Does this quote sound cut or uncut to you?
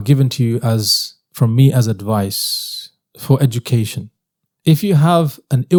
uncut